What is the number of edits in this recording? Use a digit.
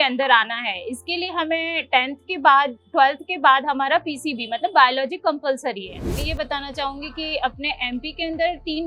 1